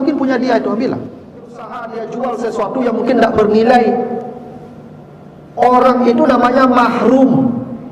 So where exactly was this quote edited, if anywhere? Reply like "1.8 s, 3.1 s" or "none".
1.8 s

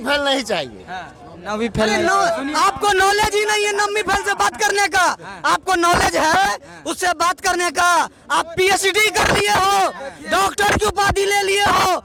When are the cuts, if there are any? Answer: none

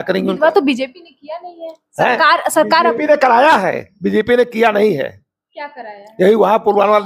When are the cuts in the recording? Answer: none

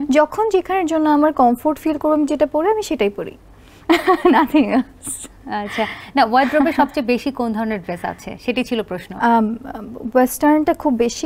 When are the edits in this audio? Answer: none

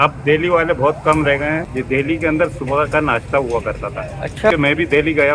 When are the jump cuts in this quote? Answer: 1.7 s, 4.5 s

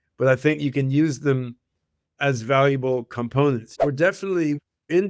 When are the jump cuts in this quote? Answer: 3.7 s

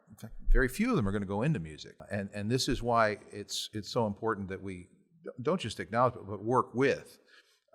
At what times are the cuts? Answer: 2.0 s

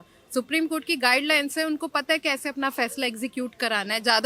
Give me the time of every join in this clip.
none

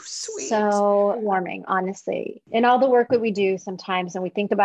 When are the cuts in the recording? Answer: 1.2 s, 2.4 s

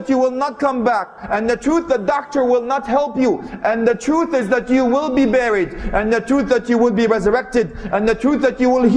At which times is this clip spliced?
none

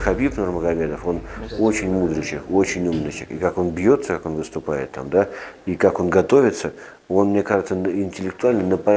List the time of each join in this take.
none

